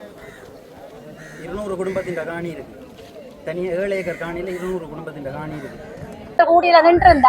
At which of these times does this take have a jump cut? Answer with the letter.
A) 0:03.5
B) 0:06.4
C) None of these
B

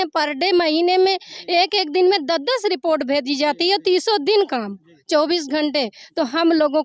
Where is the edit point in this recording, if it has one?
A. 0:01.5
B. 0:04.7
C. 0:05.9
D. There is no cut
D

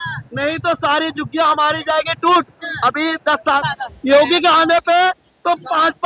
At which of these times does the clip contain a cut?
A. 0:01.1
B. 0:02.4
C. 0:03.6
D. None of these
C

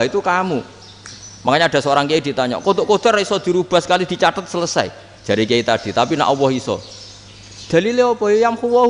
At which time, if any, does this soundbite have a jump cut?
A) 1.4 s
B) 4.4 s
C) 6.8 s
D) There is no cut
D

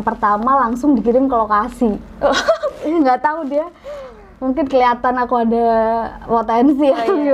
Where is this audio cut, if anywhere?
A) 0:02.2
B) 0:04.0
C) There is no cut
C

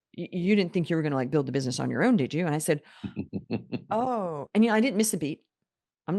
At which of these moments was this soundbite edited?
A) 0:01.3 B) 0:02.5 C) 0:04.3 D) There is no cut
D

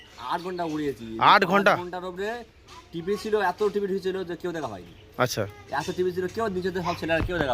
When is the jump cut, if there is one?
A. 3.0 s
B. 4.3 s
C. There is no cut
C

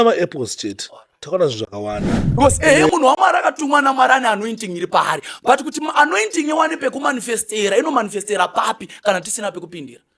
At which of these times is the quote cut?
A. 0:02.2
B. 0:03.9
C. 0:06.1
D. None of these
A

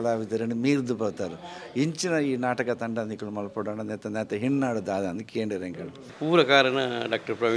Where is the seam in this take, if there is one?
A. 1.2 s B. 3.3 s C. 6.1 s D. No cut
C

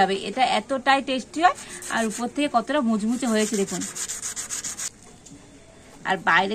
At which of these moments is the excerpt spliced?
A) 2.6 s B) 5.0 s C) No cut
B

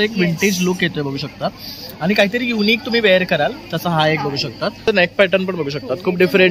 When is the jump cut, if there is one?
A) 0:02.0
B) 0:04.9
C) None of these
B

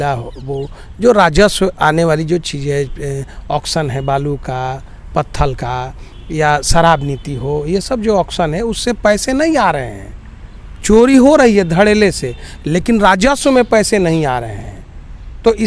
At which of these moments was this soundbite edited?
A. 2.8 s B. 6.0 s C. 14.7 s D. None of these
D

